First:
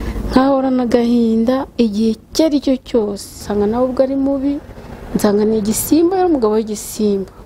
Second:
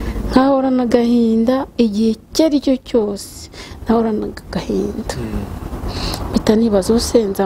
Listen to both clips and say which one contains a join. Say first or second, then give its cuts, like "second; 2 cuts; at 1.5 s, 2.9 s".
first; 1 cut; at 3.4 s